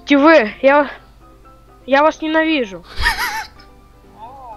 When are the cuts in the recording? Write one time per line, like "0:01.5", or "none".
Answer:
none